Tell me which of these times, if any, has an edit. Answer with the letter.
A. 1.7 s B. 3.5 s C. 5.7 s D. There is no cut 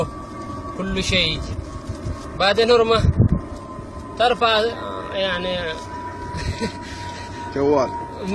B